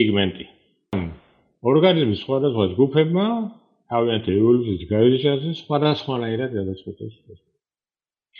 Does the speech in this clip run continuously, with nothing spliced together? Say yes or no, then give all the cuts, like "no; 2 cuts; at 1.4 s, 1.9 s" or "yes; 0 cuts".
no; 1 cut; at 0.9 s